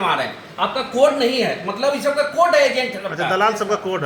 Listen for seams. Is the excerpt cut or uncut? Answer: uncut